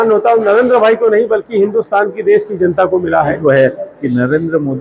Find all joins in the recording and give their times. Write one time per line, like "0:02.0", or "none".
0:03.4